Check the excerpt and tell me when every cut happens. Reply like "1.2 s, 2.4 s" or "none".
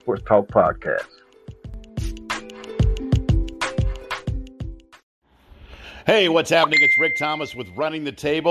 4.9 s